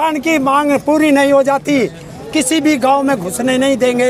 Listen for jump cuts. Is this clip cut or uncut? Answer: uncut